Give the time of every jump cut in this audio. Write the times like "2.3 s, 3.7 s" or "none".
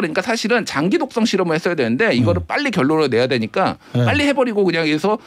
none